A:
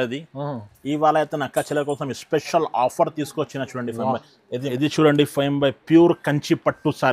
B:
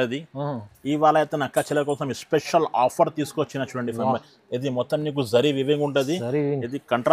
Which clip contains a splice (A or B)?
A